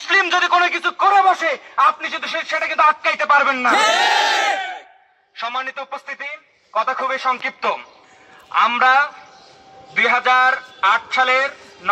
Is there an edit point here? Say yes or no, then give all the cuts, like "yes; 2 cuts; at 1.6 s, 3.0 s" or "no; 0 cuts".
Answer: no; 0 cuts